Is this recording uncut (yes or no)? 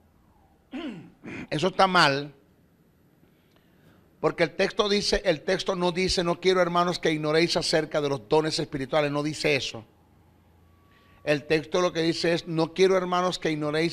no